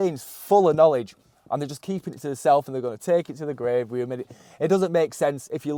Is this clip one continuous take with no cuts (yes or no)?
yes